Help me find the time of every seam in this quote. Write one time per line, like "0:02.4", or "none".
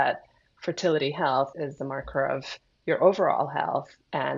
0:01.5